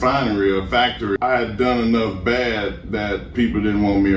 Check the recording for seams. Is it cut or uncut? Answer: cut